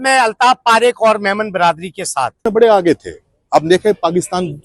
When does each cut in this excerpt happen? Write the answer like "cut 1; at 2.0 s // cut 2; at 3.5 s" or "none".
cut 1; at 2.4 s